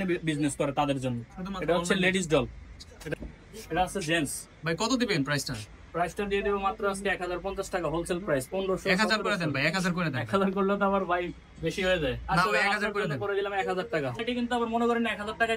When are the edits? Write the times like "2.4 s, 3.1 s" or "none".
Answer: 3.1 s, 14.2 s